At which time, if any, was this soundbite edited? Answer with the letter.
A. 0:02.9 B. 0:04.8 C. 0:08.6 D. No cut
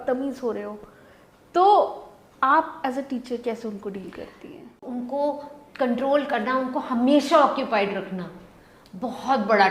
B